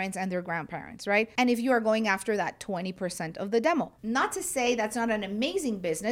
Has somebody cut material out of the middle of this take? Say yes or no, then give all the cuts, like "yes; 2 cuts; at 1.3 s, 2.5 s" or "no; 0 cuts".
yes; 2 cuts; at 1.3 s, 4.0 s